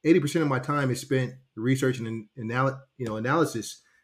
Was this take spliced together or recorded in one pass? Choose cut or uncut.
uncut